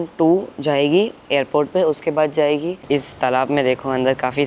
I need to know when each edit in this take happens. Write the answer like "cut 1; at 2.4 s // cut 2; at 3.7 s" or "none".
cut 1; at 2.8 s